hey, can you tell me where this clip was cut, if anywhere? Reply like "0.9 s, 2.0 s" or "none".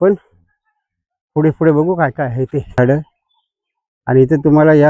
2.8 s

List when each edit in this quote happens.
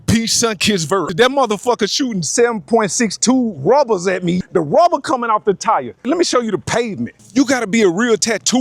1.1 s, 4.4 s, 6.0 s, 7.2 s

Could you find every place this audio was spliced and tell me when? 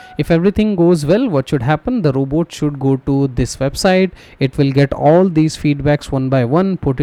none

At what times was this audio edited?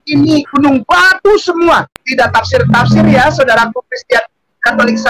2.0 s

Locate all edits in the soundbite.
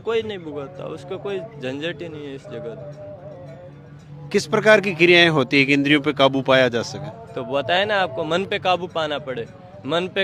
none

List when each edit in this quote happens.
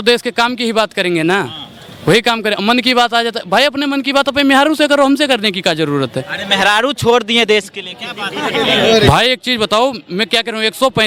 none

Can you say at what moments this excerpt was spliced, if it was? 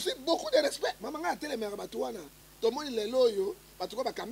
2.4 s

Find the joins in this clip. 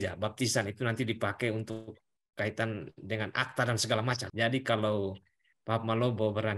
4.2 s

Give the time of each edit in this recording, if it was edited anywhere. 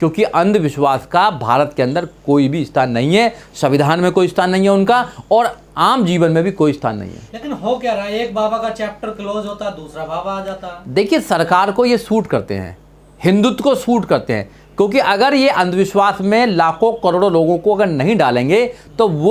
none

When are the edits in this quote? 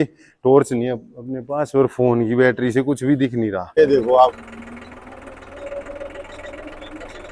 3.8 s

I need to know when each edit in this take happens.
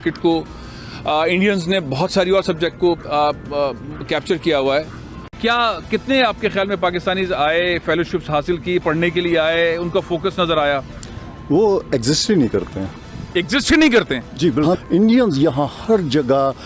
5.3 s, 14.8 s

